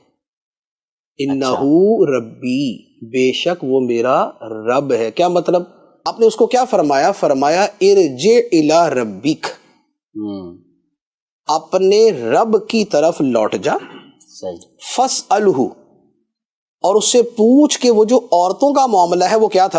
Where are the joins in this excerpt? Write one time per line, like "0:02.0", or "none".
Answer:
0:06.1